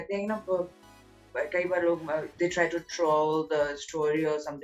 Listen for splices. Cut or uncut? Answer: uncut